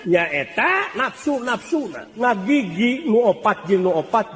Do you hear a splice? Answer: yes; 2 cuts; at 0.9 s, 2.0 s

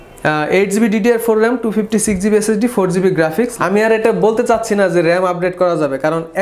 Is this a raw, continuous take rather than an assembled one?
no; 1 cut; at 3.5 s

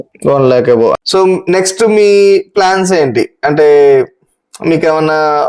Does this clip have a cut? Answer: yes; 1 cut; at 1.0 s

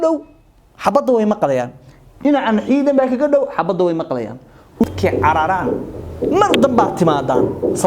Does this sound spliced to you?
yes; 1 cut; at 4.8 s

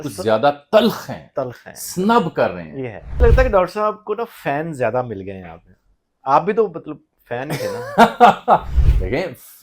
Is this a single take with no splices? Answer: no; 1 cut; at 3.2 s

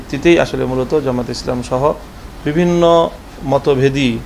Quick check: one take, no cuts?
yes; 0 cuts

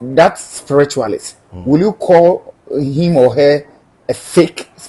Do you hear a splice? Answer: no; 0 cuts

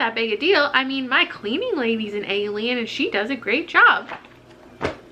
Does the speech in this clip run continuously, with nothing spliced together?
yes; 0 cuts

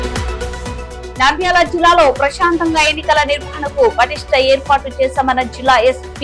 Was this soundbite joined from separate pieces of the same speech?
yes; 1 cut; at 0.9 s

